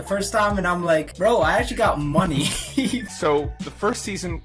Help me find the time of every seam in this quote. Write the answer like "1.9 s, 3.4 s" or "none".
1.1 s, 3.0 s